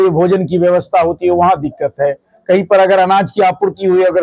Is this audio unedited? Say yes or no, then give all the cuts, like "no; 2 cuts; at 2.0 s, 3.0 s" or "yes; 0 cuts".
yes; 0 cuts